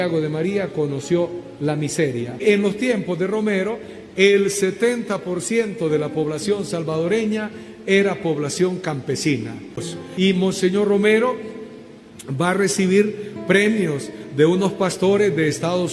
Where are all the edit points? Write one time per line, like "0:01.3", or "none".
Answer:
0:02.4
0:09.9